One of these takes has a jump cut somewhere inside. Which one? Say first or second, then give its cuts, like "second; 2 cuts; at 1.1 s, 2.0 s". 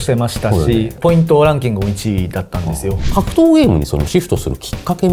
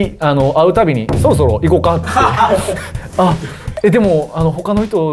first; 2 cuts; at 1.0 s, 3.0 s